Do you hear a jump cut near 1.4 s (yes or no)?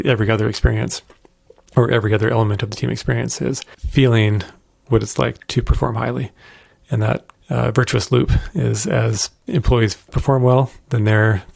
no